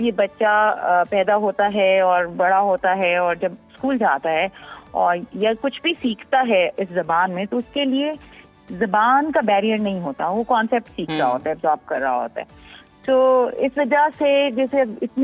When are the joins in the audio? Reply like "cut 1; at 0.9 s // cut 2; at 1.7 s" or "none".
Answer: none